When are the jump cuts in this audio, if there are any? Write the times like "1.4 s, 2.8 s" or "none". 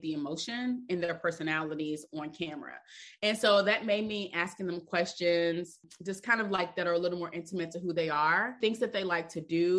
5.9 s, 8.5 s